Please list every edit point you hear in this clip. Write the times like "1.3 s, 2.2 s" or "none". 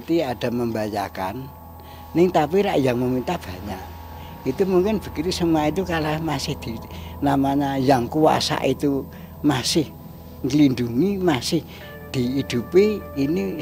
none